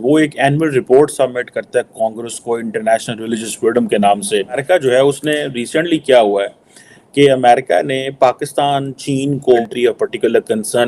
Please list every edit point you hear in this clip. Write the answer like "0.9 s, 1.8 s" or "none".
4.6 s, 9.6 s